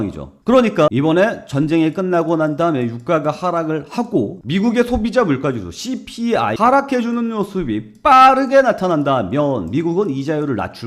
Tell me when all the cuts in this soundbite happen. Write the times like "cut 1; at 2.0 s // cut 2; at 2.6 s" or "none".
cut 1; at 0.9 s // cut 2; at 4.4 s